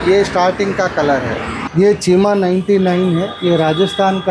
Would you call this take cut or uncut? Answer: cut